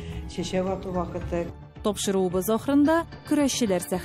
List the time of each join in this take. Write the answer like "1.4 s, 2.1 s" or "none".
1.5 s